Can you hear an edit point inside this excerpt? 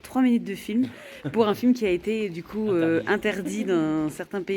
no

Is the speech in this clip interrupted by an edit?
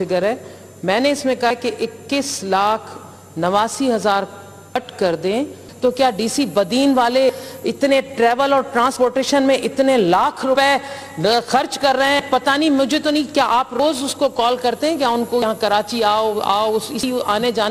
yes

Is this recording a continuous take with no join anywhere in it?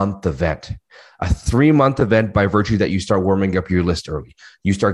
yes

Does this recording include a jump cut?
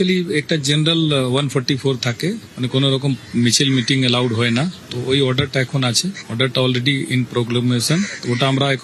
no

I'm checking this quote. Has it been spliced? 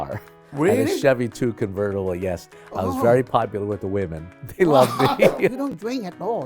yes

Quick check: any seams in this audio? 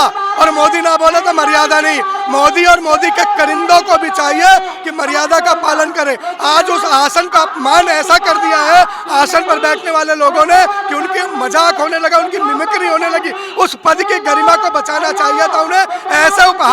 no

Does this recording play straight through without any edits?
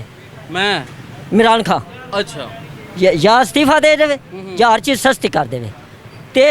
yes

